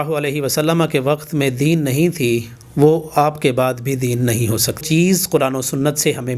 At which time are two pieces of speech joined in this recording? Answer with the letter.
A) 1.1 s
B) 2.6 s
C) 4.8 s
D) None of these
C